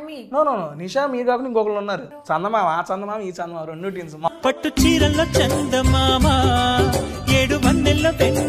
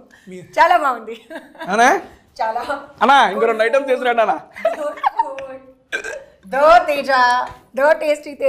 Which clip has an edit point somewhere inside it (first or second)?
first